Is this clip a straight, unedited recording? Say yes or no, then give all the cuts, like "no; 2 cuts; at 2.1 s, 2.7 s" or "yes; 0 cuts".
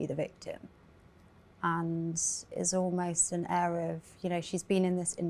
yes; 0 cuts